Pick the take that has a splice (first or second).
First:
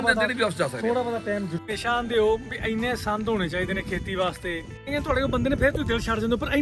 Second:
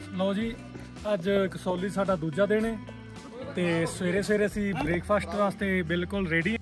first